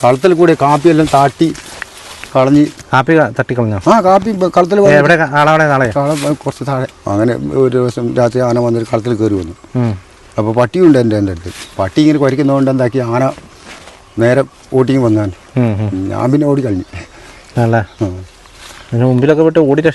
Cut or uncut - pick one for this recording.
cut